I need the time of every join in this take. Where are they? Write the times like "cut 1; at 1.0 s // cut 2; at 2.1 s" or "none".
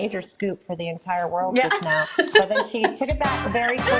none